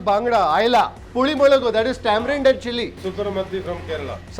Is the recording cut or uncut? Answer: cut